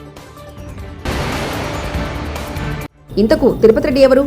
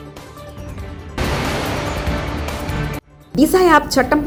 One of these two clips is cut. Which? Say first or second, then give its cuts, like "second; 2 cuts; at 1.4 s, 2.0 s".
first; 2 cuts; at 1.0 s, 3.0 s